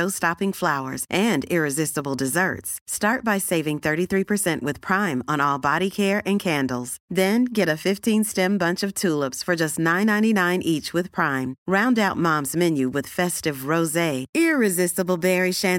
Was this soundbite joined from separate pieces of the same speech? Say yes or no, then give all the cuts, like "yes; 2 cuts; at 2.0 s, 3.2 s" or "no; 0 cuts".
no; 0 cuts